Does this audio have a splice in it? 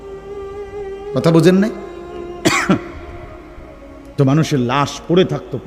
yes; 1 cut; at 1.1 s

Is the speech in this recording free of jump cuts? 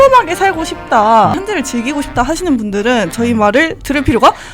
no; 1 cut; at 1.4 s

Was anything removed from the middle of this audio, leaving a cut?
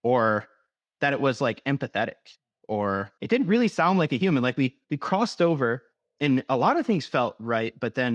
yes; 1 cut; at 3.1 s

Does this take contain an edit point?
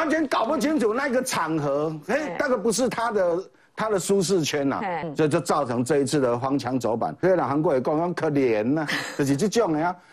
yes; 2 cuts; at 5.0 s, 7.2 s

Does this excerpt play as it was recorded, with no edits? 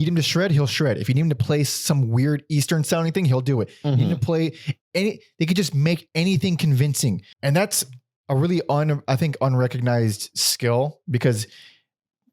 no; 1 cut; at 7.3 s

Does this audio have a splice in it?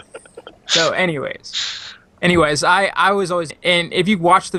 no; 0 cuts

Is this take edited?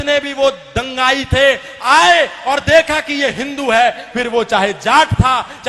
no; 0 cuts

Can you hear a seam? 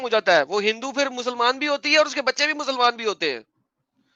no; 0 cuts

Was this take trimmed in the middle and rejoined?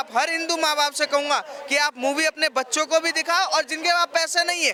no; 0 cuts

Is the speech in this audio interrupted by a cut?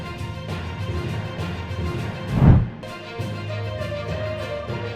yes; 1 cut; at 1.9 s

